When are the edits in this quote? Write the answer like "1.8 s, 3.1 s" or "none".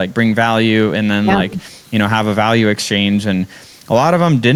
none